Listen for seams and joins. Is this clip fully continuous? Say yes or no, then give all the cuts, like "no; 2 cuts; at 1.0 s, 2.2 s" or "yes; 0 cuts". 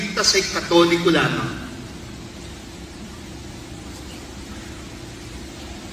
yes; 0 cuts